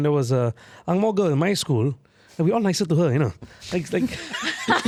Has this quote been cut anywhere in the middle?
no; 0 cuts

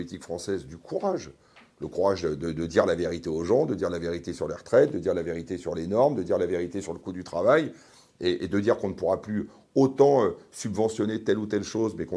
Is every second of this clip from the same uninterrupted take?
yes; 0 cuts

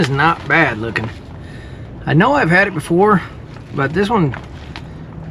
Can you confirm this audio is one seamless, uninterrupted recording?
yes; 0 cuts

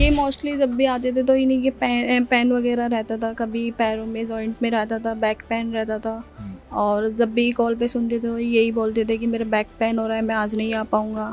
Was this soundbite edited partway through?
no; 0 cuts

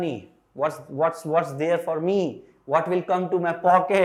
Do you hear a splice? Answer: no; 0 cuts

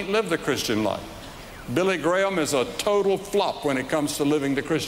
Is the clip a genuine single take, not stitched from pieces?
yes; 0 cuts

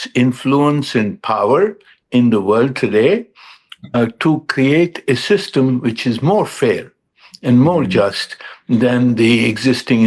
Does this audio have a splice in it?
no; 0 cuts

